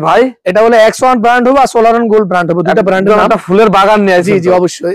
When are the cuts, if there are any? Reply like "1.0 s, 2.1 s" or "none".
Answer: none